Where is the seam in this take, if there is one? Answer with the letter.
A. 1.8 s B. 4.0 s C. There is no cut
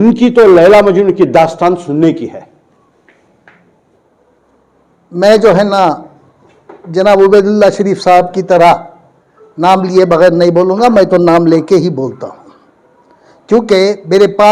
B